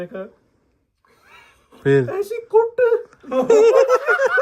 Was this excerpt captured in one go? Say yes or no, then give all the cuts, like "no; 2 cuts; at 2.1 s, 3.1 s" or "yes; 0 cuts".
yes; 0 cuts